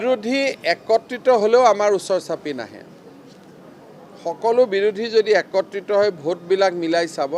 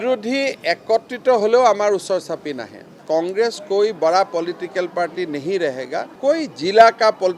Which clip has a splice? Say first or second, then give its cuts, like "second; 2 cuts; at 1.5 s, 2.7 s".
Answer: second; 2 cuts; at 2.9 s, 6.1 s